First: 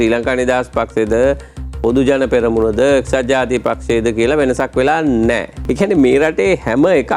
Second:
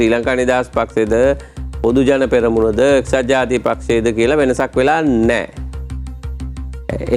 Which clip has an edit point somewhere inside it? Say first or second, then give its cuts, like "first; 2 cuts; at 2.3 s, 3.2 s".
first; 1 cut; at 5.6 s